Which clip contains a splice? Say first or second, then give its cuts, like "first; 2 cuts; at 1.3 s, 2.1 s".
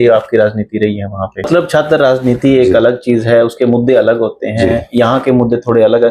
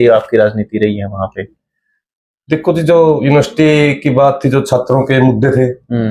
first; 1 cut; at 1.5 s